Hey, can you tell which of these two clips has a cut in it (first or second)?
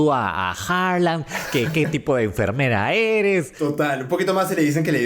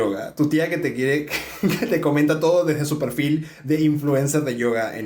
first